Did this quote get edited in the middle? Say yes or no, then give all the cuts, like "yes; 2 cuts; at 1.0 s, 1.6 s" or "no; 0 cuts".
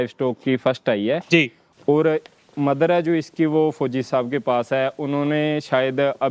no; 0 cuts